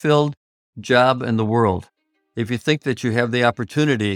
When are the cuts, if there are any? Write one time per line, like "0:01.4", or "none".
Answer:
none